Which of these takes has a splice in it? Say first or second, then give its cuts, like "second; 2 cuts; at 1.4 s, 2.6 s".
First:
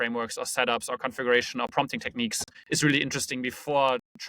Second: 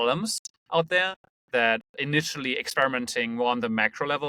first; 1 cut; at 2.5 s